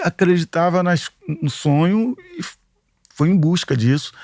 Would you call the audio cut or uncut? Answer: uncut